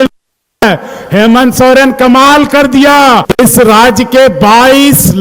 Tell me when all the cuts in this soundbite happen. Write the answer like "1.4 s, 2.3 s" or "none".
3.3 s

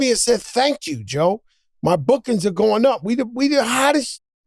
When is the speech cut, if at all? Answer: none

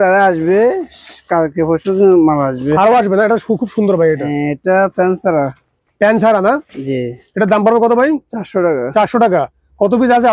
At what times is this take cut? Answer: none

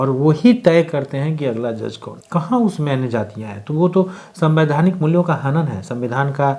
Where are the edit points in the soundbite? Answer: none

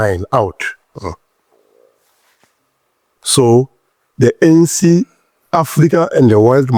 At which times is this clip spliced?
none

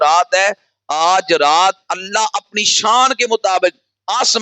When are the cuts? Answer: none

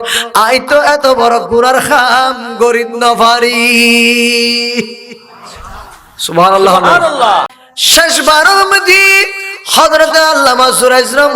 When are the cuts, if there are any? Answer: 7.5 s

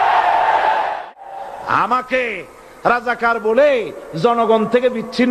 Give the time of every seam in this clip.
1.0 s

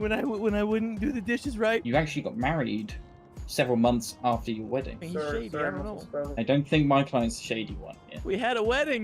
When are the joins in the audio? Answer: 1.8 s

